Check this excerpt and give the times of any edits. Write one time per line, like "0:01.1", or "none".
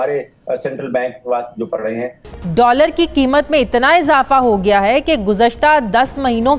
0:02.0